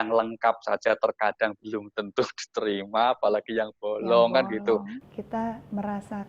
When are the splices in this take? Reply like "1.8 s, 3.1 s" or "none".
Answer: 4.9 s